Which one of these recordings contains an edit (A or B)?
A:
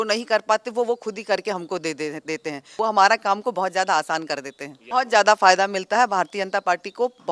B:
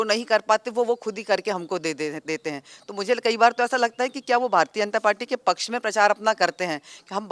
A